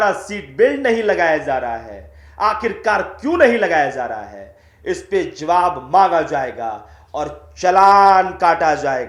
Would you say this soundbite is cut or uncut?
uncut